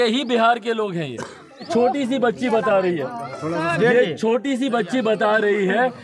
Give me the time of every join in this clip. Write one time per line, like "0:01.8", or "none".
0:01.7